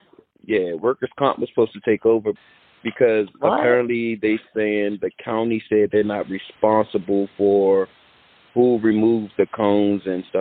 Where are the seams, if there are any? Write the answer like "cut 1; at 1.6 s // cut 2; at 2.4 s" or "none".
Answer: cut 1; at 2.4 s

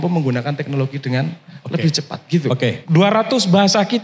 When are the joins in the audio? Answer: cut 1; at 2.8 s

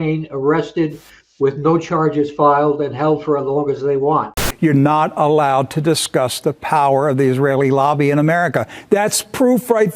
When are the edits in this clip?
cut 1; at 4.4 s

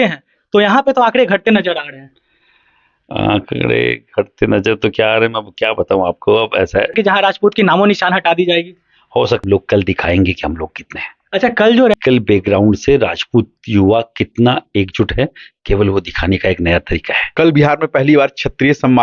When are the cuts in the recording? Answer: cut 1; at 6.9 s // cut 2; at 9.4 s // cut 3; at 11.9 s // cut 4; at 17.2 s

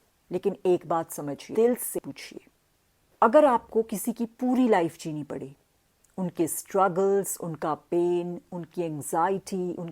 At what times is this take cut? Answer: cut 1; at 1.4 s

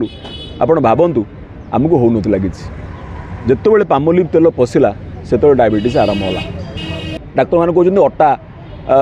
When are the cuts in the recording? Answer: cut 1; at 7.1 s

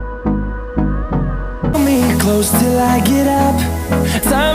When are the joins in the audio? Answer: cut 1; at 1.7 s

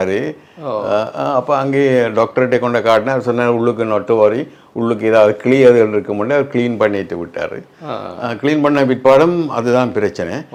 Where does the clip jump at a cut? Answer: none

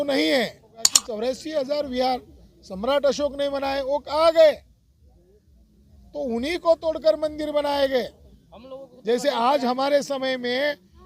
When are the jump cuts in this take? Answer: cut 1; at 1.0 s

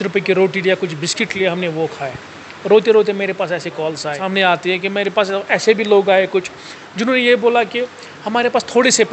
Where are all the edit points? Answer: cut 1; at 4.2 s

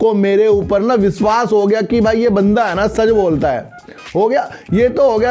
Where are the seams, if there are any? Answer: none

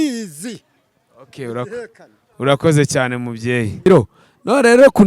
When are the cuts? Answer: cut 1; at 3.9 s

